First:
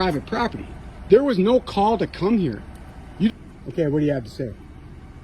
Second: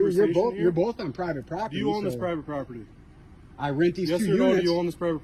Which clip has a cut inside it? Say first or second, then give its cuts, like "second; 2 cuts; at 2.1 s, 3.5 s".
first; 1 cut; at 3.3 s